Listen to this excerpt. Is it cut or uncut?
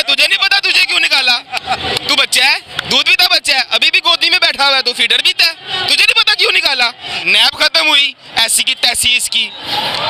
cut